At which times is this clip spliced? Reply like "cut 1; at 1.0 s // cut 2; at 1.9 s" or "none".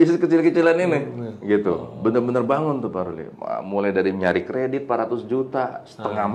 cut 1; at 3.3 s